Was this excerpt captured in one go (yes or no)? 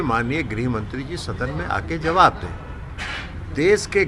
yes